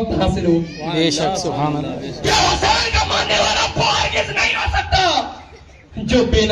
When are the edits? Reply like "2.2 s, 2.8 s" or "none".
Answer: 2.1 s